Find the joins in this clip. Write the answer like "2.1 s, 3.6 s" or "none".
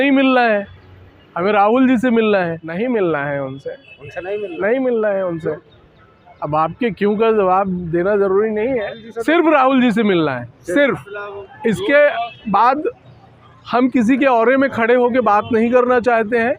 2.7 s, 9.1 s

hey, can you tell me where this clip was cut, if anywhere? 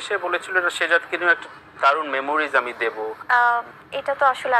3.2 s

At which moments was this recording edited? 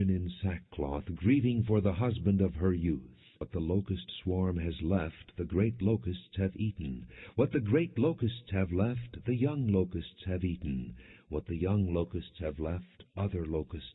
none

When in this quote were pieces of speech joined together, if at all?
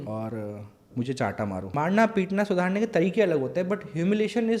1.7 s

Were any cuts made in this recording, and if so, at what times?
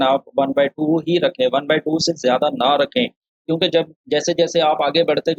none

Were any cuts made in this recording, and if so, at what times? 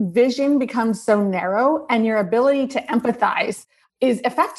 none

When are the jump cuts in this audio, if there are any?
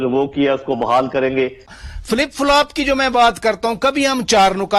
1.7 s

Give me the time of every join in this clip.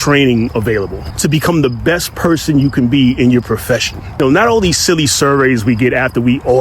1.0 s, 4.2 s

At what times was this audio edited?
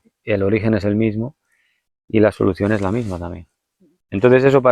none

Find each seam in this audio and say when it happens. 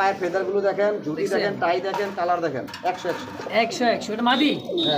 none

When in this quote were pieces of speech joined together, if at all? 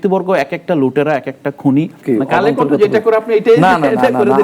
2.0 s

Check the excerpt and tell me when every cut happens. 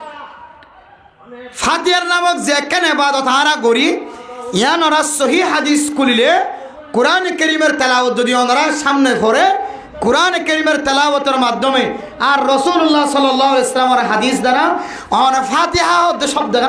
none

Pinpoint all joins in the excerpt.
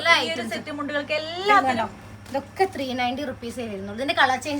1.6 s

